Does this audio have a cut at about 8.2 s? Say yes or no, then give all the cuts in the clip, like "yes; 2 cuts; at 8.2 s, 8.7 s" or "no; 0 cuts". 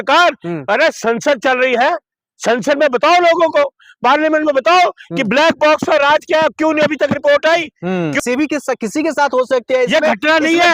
yes; 1 cut; at 8.2 s